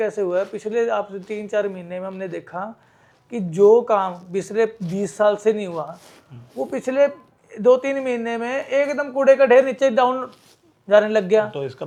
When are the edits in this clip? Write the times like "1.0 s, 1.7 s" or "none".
none